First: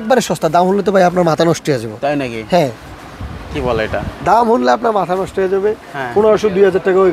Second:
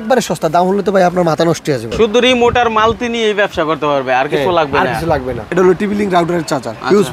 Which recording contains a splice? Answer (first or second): second